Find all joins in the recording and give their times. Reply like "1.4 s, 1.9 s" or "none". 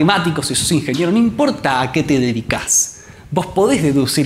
none

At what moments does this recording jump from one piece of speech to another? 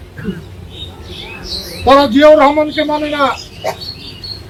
none

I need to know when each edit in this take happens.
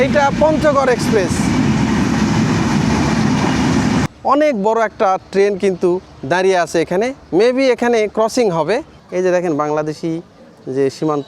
4.1 s, 7.2 s, 9.0 s

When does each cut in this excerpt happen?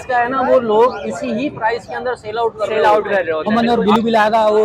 3.5 s

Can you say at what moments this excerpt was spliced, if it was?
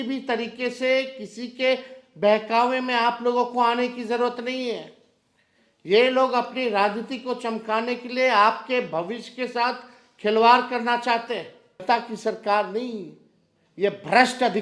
11.8 s

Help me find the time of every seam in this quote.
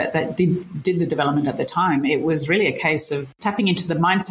3.3 s

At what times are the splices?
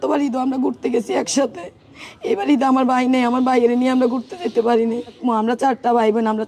5.2 s

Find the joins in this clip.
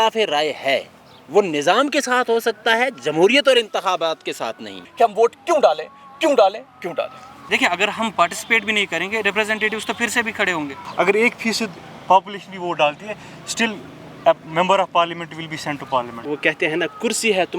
4.8 s, 7.4 s, 10.8 s, 16.2 s

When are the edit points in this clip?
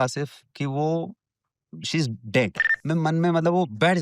2.7 s

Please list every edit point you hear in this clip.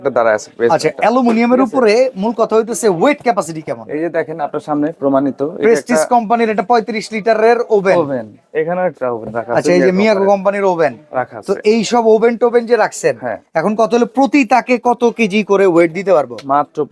none

